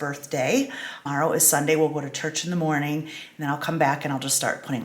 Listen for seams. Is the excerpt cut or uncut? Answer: cut